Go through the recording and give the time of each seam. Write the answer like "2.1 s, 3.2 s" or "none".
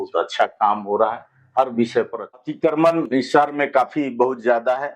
2.4 s